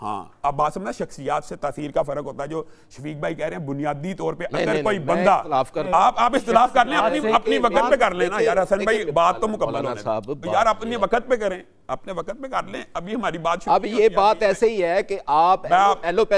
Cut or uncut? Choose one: uncut